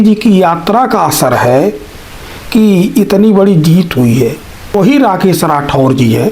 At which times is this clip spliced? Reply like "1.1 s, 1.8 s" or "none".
4.8 s